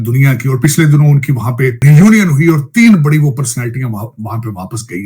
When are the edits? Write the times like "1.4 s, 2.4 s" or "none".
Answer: 1.8 s